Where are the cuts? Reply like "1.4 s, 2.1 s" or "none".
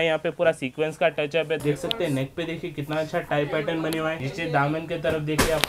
1.6 s, 4.3 s